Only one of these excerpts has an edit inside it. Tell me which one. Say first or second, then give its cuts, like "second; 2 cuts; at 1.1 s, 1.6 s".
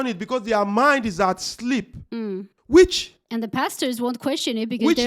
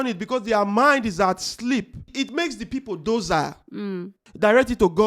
second; 2 cuts; at 2.1 s, 4.2 s